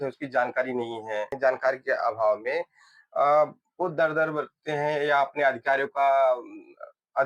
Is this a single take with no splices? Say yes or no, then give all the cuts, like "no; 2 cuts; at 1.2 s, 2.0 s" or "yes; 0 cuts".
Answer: no; 1 cut; at 1.3 s